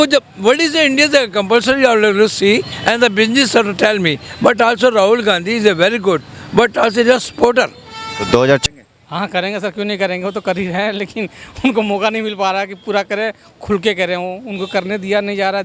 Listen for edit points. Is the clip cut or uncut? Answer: cut